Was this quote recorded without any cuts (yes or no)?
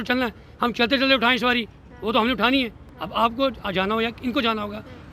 yes